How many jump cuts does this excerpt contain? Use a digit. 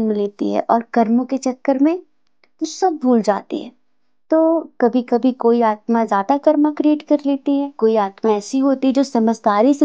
1